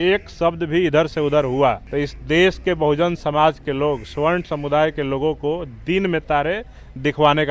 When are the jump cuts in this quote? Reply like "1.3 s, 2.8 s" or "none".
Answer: 1.8 s